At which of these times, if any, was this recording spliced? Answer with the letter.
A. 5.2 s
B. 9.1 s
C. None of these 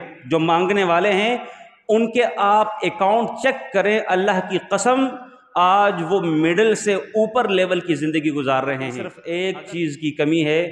B